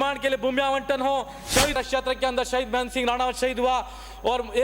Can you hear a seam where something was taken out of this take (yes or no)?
yes